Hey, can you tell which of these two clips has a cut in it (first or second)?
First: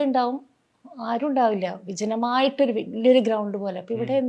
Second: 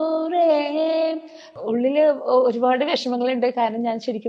second